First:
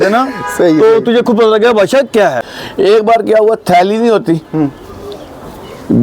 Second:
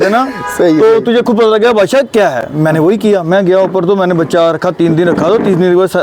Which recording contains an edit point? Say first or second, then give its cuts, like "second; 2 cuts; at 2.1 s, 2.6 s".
first; 1 cut; at 2.5 s